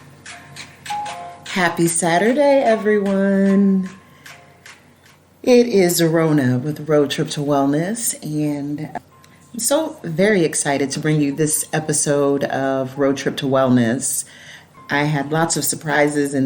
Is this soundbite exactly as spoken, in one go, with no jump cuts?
no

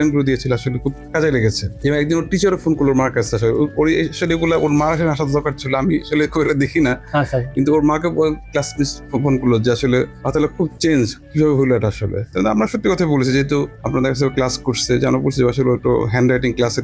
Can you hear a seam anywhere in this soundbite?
no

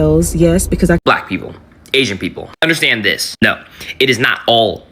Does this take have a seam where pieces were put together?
yes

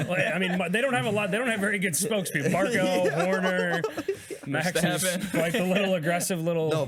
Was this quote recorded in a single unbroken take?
yes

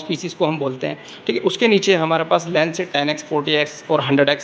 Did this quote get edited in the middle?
no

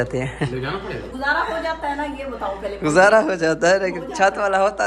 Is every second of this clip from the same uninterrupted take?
yes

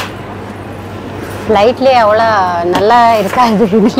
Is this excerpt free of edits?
yes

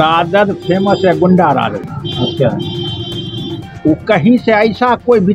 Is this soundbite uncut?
yes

